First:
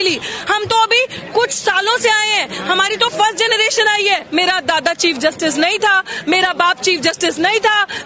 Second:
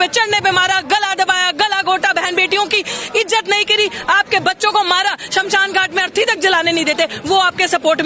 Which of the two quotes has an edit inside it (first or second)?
first